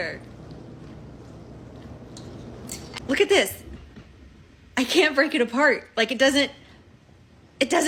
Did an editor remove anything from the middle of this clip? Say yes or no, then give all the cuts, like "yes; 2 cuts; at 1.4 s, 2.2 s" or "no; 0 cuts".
no; 0 cuts